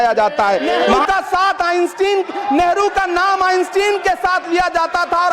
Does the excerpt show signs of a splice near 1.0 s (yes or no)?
yes